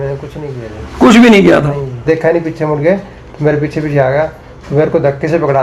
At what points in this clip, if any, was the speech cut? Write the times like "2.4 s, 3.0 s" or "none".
2.0 s